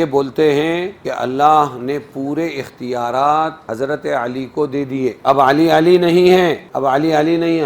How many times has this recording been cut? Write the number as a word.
four